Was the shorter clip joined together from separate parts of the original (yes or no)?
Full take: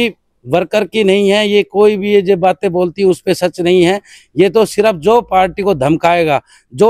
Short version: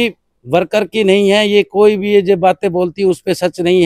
no